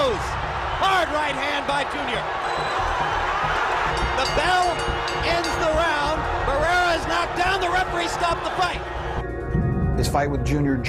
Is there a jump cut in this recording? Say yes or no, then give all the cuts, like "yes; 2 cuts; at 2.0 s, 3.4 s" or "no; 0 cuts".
no; 0 cuts